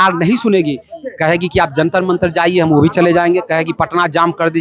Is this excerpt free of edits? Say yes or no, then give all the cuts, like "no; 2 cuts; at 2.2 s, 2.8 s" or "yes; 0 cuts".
yes; 0 cuts